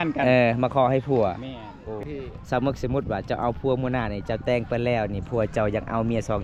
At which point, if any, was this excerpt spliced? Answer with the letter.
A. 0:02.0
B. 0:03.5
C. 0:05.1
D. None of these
A